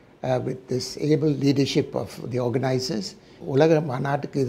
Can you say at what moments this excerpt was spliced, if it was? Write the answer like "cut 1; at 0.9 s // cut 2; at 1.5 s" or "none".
cut 1; at 3.3 s